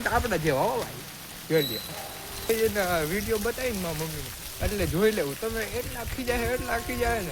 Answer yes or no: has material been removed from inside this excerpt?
yes